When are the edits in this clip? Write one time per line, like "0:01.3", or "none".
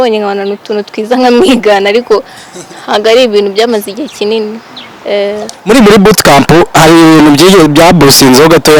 0:05.6